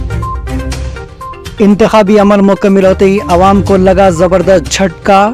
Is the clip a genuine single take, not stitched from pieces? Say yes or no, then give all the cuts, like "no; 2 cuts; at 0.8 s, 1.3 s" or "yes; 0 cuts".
yes; 0 cuts